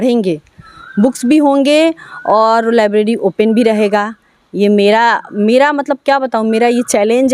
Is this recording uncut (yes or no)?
yes